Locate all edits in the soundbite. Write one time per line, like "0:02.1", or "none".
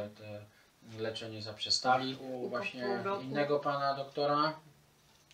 none